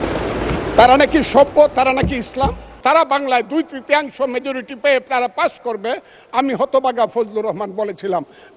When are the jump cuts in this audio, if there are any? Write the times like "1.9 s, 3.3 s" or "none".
2.8 s